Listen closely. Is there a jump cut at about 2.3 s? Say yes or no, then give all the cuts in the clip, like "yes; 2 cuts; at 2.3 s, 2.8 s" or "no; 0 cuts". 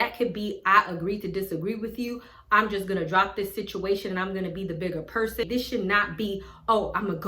no; 1 cut; at 5.5 s